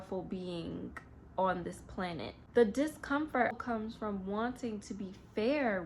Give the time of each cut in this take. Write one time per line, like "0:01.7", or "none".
0:02.3
0:03.6